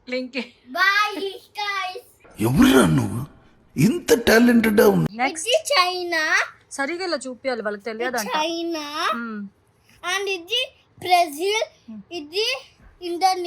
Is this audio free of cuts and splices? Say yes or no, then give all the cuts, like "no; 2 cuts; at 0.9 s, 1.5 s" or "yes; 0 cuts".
no; 1 cut; at 5.1 s